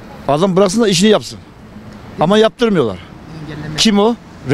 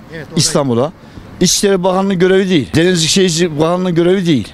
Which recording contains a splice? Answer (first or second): second